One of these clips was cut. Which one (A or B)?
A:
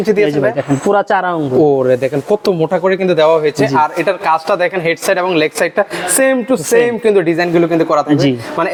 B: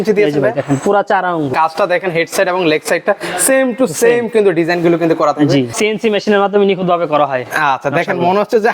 B